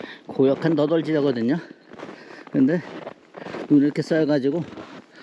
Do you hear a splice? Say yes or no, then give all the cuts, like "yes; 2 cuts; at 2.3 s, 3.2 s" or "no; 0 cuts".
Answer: no; 0 cuts